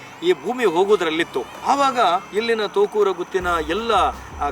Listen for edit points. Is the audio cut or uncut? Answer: cut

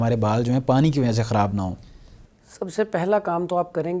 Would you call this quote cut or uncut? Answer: uncut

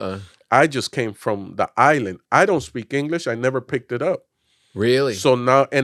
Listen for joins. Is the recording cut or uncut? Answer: uncut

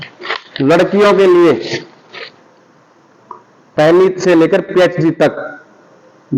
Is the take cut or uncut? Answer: uncut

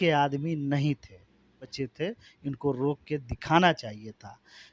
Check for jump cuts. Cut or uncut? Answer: cut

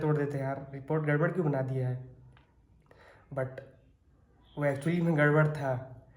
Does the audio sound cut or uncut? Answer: uncut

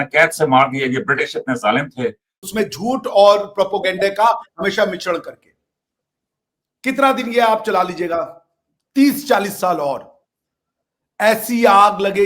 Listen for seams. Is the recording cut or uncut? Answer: cut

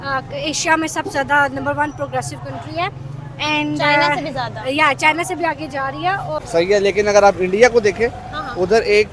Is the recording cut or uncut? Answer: cut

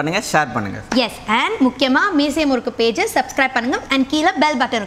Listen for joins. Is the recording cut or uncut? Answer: uncut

